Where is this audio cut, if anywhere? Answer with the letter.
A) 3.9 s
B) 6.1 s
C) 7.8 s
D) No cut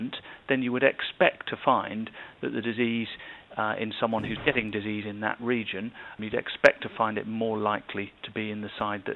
B